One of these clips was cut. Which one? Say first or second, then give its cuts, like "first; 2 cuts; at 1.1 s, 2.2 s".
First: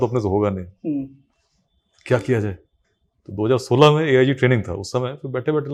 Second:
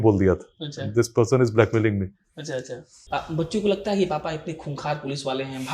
second; 1 cut; at 2.9 s